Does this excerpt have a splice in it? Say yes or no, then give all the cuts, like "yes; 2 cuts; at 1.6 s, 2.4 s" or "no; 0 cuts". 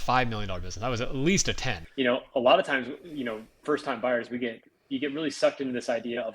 yes; 1 cut; at 1.8 s